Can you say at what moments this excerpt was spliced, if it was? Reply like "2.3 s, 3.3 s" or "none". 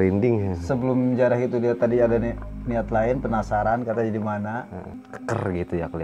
4.9 s